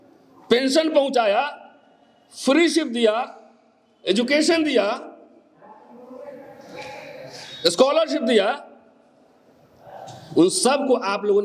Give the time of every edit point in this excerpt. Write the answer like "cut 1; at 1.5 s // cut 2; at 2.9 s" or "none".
none